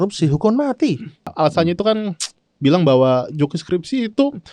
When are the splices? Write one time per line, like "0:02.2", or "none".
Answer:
0:01.3

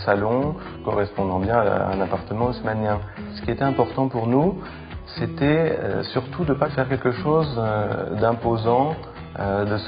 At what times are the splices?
0:02.3

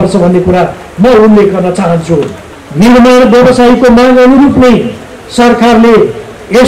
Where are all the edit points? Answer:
none

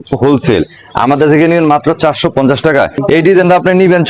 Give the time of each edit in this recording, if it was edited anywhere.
0:03.0

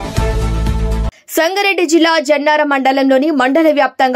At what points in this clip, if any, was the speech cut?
0:01.2

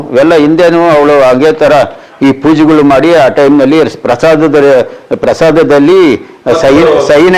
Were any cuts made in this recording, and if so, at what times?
none

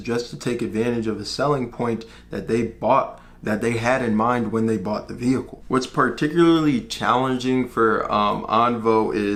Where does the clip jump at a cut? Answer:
none

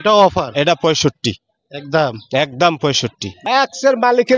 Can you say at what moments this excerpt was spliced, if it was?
0:03.3

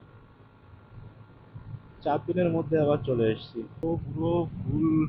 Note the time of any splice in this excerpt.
0:03.6

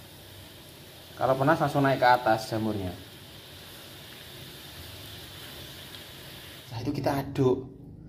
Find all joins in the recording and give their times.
0:06.7

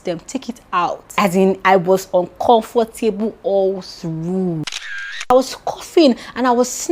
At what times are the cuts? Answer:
0:01.0
0:05.3

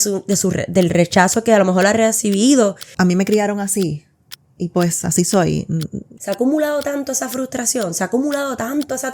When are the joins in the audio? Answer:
0:02.8
0:06.1

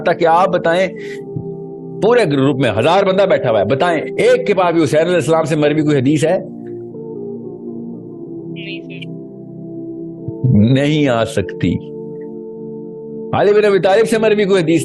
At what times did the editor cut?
0:06.4
0:08.5
0:10.4

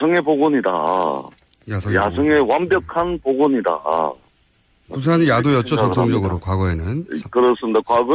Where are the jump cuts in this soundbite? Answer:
none

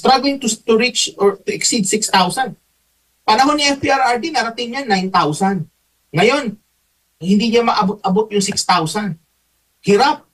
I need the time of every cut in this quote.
none

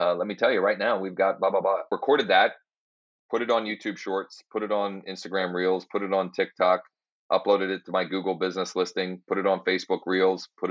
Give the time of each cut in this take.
0:01.9

